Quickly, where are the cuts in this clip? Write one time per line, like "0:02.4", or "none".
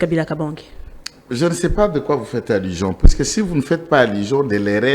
none